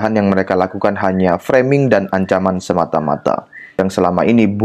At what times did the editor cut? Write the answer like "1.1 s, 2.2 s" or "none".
3.6 s